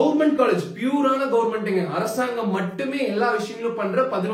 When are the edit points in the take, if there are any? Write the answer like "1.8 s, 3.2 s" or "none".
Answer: none

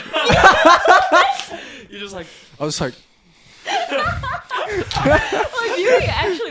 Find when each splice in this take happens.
none

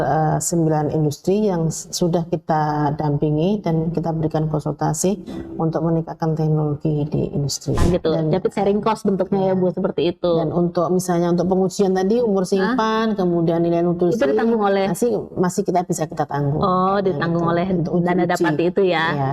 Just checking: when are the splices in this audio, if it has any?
7.8 s

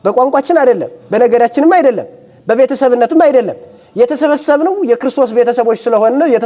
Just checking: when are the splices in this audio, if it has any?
none

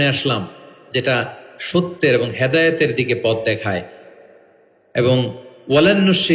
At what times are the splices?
none

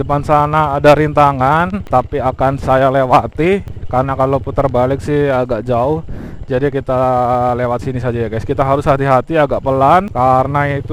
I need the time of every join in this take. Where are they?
1.8 s, 3.8 s, 10.1 s

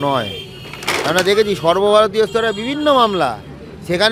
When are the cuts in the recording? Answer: none

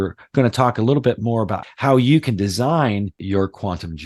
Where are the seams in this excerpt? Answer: 3.2 s

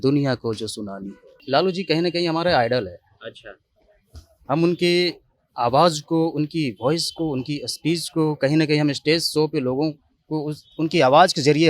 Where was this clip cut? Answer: 1.3 s

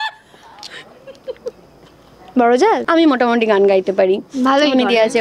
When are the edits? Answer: 2.8 s

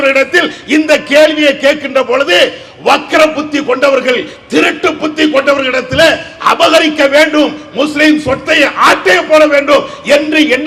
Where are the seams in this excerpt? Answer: none

